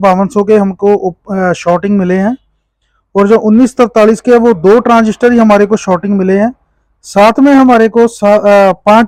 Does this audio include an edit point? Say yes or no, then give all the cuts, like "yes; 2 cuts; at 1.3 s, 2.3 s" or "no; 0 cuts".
no; 0 cuts